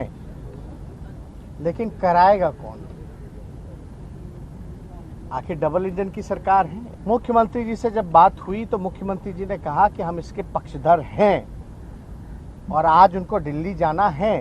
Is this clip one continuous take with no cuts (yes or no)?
no